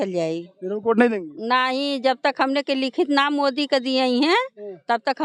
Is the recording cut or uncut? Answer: uncut